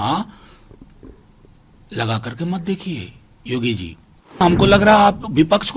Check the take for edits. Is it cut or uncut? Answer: cut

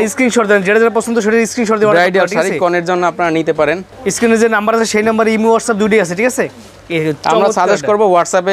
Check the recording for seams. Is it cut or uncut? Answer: uncut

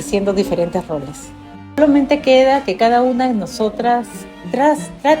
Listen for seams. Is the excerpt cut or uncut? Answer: cut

